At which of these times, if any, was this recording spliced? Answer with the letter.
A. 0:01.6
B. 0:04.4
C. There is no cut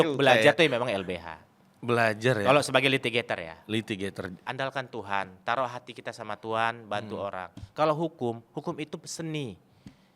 B